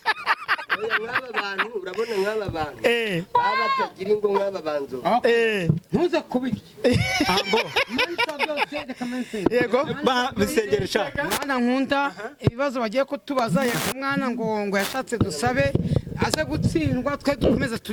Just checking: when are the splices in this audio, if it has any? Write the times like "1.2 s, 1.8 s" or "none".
none